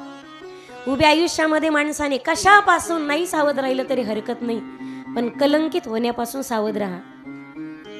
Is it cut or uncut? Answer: uncut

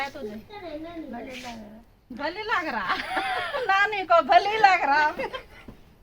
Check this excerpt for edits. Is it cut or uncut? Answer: uncut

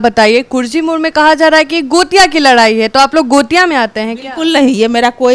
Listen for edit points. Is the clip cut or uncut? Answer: uncut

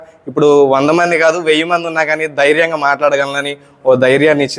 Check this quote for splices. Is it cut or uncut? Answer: uncut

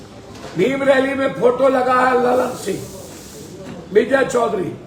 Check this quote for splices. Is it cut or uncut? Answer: uncut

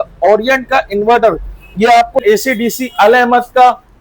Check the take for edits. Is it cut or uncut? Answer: cut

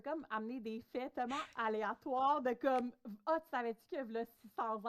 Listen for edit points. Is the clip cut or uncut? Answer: uncut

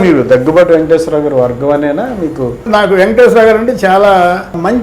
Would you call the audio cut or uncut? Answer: cut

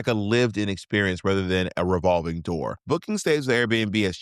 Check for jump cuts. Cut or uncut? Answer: cut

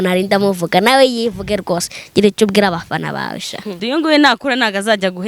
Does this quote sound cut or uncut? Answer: cut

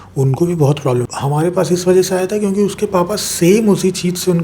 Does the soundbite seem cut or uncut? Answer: cut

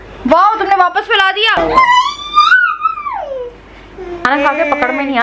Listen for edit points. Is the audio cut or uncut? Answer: cut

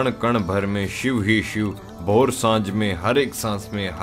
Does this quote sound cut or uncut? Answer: uncut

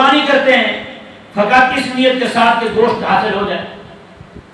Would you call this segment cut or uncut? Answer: uncut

